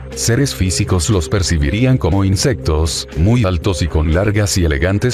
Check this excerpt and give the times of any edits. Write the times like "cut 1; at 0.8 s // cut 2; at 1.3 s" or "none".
cut 1; at 2.3 s